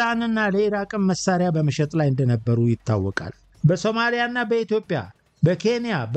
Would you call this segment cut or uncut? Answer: cut